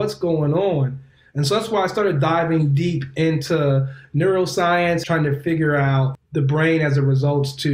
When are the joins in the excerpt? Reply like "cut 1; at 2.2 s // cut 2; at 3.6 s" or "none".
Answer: cut 1; at 5.0 s // cut 2; at 6.1 s